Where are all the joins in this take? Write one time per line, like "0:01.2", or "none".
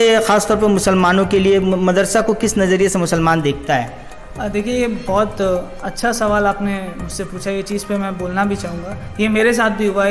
none